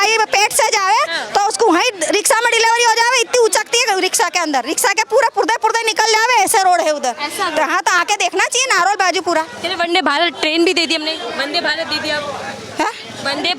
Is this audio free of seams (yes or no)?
yes